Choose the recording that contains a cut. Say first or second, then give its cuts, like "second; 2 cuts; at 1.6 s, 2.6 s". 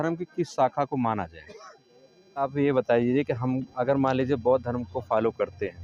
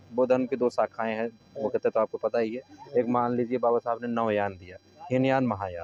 first; 1 cut; at 2.4 s